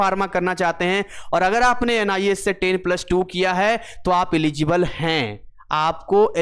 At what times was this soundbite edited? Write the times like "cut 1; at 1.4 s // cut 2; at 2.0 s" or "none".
none